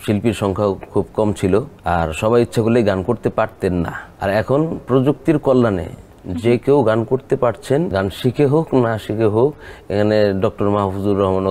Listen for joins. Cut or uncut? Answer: cut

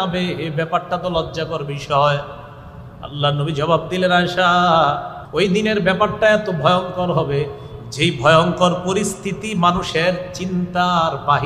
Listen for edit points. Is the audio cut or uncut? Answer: cut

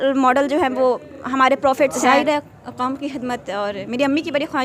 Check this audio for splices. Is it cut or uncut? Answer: cut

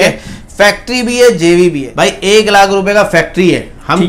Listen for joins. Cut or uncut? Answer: cut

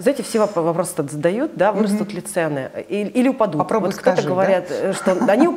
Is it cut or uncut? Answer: uncut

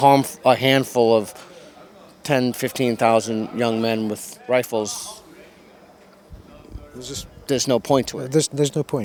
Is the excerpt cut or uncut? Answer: uncut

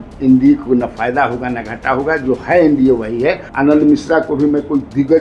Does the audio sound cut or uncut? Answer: cut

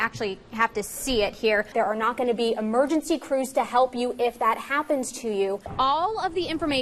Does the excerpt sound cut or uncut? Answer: cut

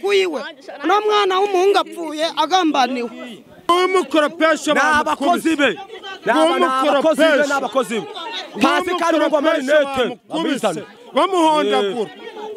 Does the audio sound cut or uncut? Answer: cut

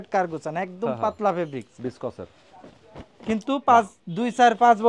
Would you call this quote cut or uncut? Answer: uncut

